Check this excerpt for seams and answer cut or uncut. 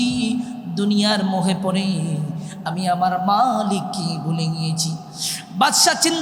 uncut